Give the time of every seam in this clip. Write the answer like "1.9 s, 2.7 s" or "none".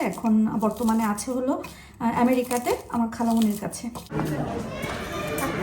4.3 s